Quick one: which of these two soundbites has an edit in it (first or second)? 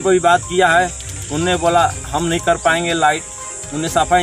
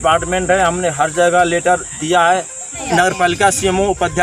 second